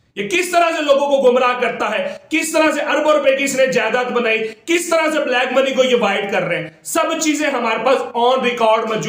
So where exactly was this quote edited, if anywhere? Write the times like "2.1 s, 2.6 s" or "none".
none